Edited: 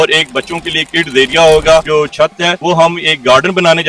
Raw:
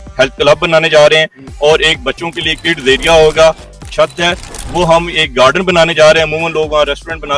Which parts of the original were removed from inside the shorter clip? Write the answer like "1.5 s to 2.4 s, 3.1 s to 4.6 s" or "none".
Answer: 3.9 s to 4.3 s